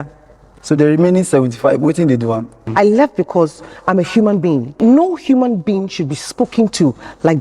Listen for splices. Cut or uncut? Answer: cut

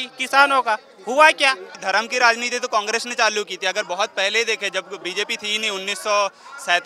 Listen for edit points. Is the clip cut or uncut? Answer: cut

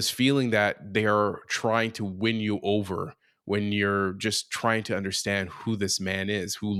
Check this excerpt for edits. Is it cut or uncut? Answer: uncut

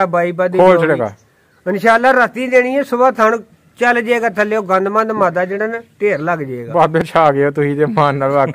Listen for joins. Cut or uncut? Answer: uncut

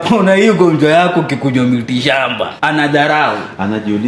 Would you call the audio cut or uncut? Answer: cut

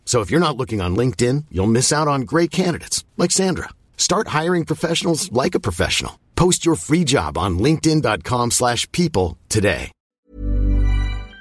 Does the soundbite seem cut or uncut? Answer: cut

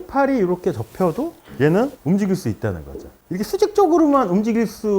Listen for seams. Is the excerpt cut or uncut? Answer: cut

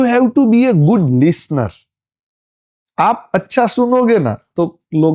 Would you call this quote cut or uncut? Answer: uncut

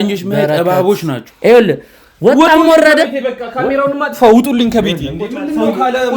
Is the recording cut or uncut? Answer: cut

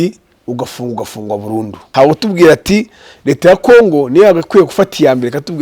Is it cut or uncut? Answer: cut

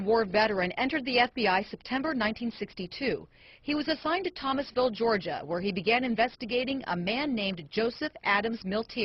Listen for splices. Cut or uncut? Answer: uncut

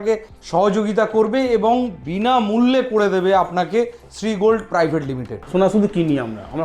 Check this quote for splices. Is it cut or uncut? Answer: cut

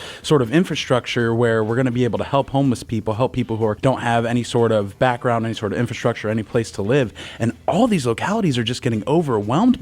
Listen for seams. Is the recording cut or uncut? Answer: cut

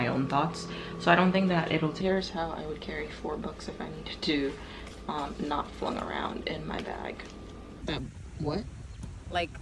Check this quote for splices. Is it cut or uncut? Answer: cut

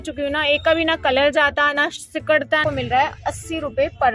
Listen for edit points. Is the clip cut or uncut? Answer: cut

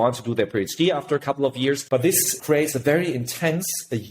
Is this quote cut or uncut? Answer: cut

